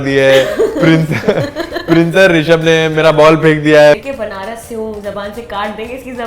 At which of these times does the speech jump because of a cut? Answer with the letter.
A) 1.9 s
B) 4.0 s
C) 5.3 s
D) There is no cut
B